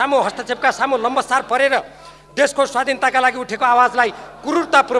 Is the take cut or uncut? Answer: uncut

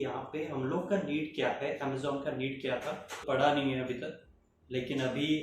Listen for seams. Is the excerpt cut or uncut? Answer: cut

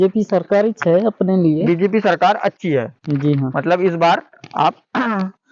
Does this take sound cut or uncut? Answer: uncut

